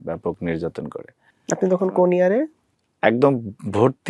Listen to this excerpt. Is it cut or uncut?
uncut